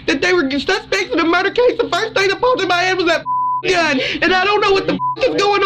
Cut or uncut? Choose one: cut